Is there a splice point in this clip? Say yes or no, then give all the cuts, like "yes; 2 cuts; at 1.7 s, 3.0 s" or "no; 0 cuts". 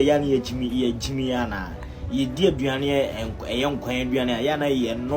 no; 0 cuts